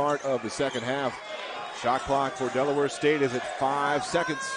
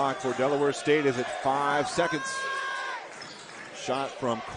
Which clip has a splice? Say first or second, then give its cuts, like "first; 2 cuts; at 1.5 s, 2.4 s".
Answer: first; 1 cut; at 1.2 s